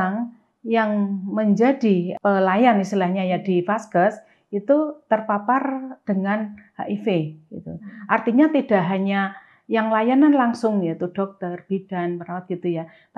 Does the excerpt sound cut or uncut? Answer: cut